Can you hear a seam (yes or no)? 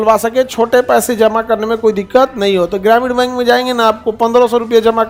no